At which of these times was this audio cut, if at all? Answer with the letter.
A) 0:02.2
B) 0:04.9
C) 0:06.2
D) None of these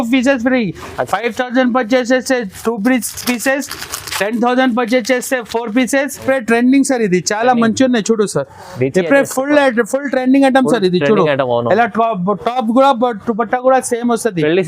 C